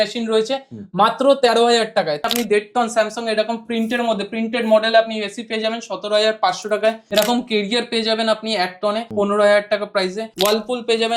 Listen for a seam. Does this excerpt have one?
yes; 4 cuts; at 2.3 s, 7.0 s, 9.1 s, 10.2 s

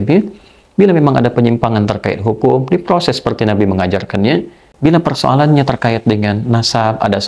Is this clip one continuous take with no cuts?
no; 1 cut; at 4.6 s

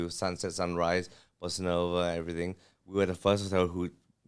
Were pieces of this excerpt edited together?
no; 0 cuts

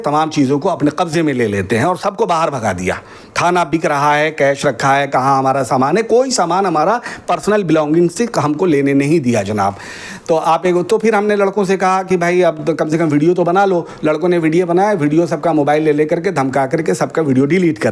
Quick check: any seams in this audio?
no; 0 cuts

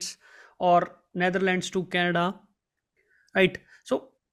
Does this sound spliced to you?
no; 0 cuts

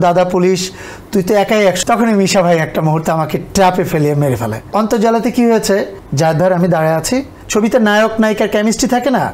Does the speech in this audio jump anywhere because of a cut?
yes; 4 cuts; at 1.8 s, 4.6 s, 6.0 s, 7.4 s

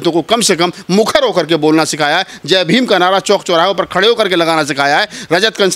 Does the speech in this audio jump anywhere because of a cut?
no; 0 cuts

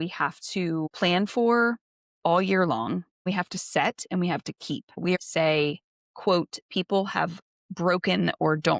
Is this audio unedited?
no; 3 cuts; at 0.9 s, 3.3 s, 5.2 s

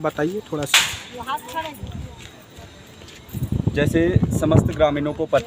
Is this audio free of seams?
yes; 0 cuts

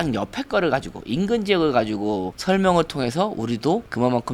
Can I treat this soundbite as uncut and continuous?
no; 1 cut; at 2.3 s

